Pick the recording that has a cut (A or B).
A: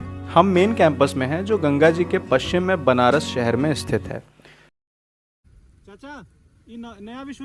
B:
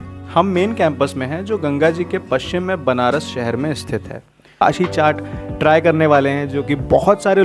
B